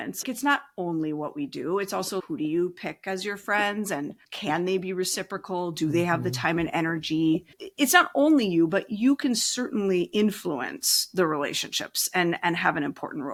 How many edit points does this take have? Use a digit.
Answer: 0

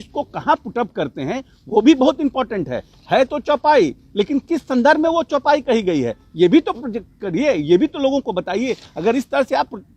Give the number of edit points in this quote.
0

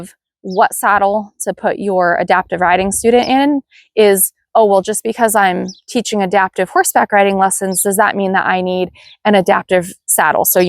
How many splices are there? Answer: 0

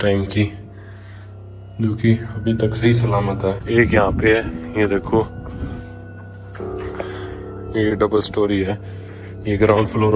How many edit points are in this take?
1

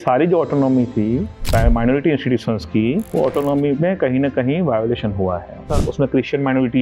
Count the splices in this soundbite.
3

